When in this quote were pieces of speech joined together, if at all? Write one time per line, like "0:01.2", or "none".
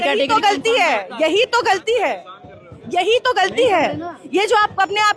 none